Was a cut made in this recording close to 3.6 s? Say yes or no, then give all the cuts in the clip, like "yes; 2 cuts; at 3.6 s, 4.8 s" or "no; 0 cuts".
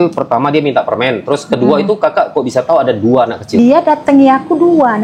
yes; 1 cut; at 3.6 s